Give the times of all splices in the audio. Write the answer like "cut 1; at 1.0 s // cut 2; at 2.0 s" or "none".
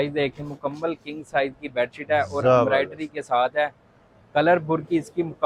none